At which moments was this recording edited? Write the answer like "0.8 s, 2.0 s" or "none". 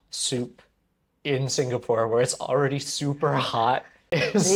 none